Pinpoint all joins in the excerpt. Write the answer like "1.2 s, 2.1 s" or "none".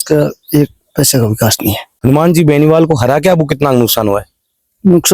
1.9 s